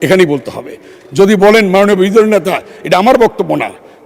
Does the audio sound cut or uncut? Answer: uncut